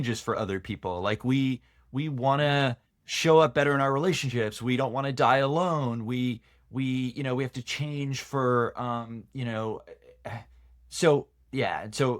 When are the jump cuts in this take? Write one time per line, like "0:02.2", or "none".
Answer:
none